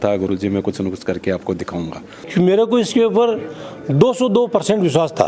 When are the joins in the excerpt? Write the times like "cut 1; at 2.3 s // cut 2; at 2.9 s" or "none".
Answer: cut 1; at 2.2 s